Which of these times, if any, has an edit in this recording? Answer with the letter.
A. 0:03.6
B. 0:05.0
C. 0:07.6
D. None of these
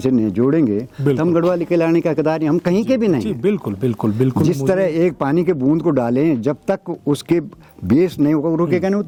D